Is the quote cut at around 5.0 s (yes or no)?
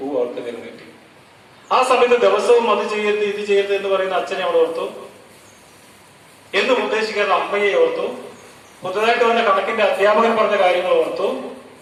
no